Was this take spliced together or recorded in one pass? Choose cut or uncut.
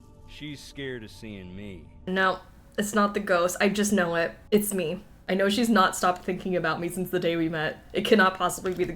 cut